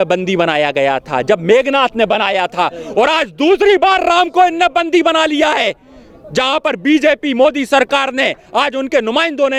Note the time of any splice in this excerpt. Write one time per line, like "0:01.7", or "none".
none